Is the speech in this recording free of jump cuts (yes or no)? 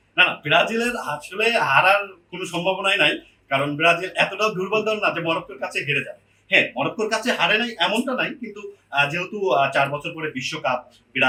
yes